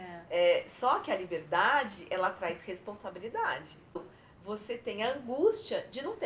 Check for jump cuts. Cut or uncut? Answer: cut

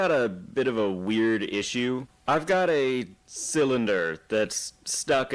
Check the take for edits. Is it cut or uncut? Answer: cut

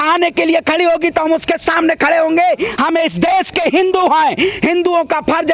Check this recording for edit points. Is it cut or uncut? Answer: uncut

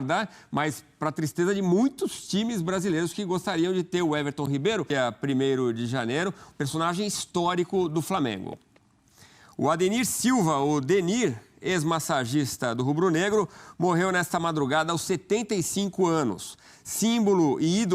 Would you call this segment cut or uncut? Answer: cut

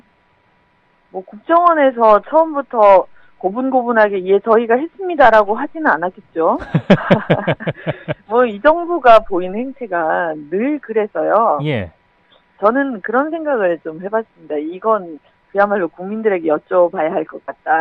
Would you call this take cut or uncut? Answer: uncut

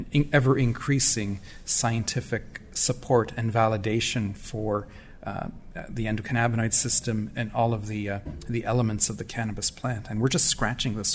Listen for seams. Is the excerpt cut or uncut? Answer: uncut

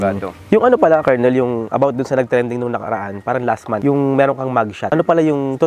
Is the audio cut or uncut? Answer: uncut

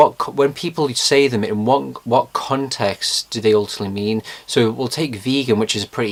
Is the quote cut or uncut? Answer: uncut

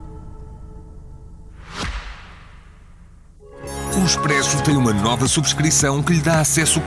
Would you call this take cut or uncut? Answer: cut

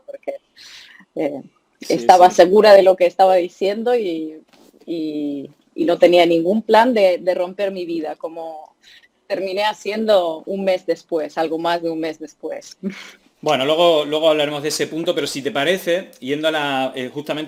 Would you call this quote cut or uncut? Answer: uncut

